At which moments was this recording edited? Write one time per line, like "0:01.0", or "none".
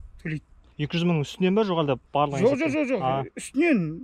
none